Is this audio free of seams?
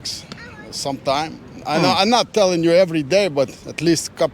yes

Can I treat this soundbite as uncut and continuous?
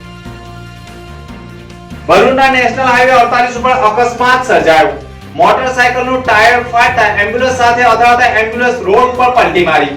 no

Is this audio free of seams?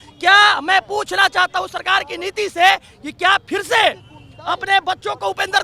yes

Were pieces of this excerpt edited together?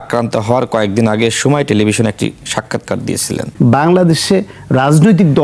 yes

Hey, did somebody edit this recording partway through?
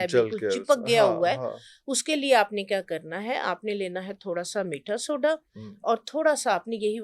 no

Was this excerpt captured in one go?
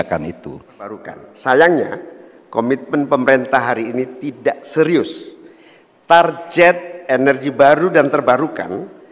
no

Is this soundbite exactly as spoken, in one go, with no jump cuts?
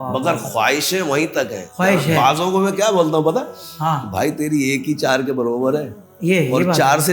no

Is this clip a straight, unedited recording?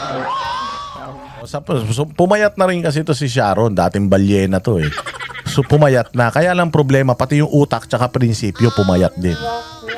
yes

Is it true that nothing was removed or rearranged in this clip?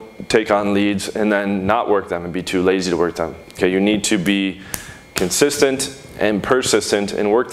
yes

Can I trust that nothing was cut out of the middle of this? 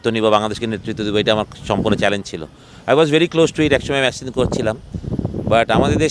yes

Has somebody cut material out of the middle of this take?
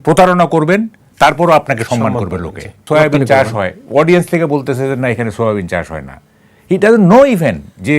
yes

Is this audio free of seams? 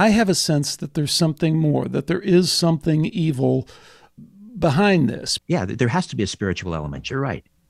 no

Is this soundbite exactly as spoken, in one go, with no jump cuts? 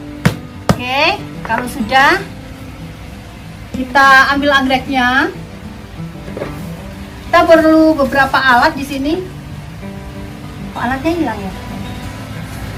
yes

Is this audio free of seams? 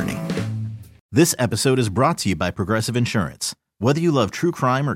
no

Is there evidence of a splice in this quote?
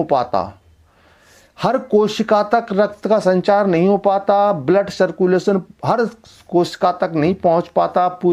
no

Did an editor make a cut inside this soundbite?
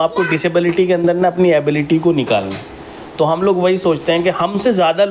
no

